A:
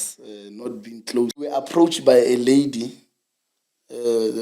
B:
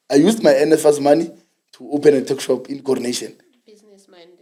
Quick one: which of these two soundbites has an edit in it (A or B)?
A